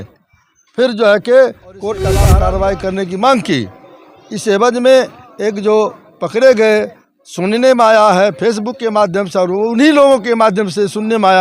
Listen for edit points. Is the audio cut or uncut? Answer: cut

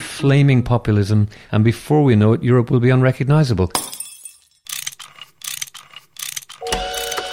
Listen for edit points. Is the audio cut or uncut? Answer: cut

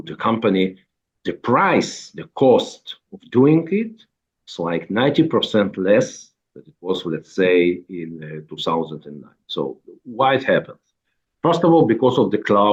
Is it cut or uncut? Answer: uncut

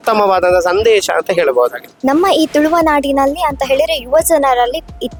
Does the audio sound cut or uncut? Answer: uncut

